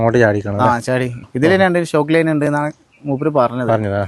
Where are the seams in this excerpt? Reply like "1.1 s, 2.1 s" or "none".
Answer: 1.2 s